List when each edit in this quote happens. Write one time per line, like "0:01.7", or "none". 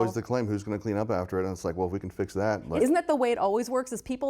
0:02.8